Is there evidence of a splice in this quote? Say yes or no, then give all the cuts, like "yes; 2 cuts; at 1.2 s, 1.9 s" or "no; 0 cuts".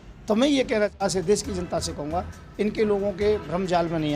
yes; 1 cut; at 0.9 s